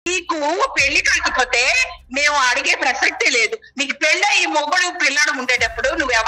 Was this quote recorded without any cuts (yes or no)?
yes